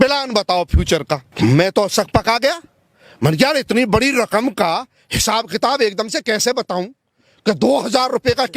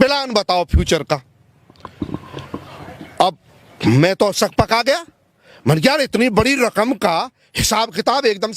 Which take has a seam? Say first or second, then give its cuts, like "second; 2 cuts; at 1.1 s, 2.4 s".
first; 1 cut; at 1.3 s